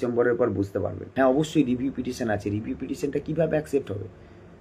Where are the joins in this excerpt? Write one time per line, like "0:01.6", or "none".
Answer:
0:01.0